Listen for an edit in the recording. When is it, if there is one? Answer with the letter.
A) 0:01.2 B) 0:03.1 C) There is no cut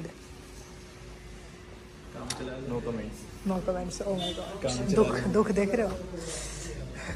C